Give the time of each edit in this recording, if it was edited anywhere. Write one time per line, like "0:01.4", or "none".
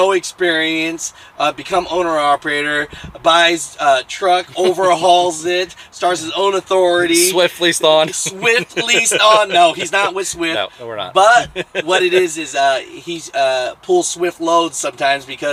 none